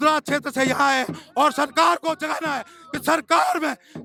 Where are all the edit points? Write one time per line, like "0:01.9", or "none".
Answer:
none